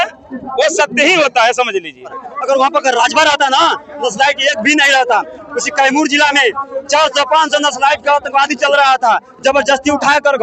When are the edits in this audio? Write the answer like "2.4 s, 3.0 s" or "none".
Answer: 2.3 s